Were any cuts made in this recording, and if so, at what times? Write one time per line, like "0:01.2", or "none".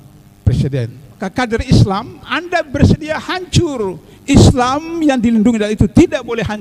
0:01.2